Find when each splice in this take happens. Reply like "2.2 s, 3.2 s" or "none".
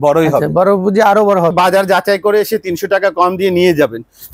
1.5 s